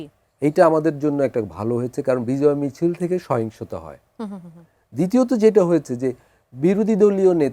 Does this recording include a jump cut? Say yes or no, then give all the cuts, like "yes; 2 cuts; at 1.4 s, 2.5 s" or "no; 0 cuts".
no; 0 cuts